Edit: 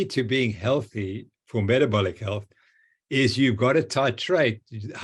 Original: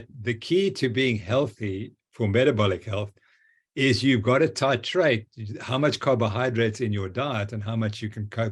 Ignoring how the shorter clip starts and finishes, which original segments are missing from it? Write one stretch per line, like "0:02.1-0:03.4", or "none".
none